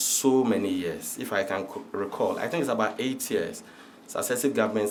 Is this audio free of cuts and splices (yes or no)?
yes